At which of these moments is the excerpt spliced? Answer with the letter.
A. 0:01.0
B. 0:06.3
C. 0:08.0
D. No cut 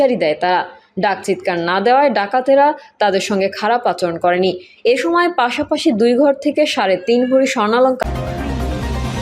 C